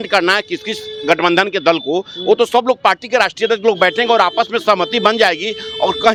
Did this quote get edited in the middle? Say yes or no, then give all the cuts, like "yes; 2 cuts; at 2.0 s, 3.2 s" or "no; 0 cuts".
no; 0 cuts